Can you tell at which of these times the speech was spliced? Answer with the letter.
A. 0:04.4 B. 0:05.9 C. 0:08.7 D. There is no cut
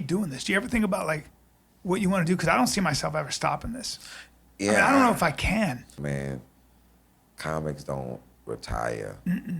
B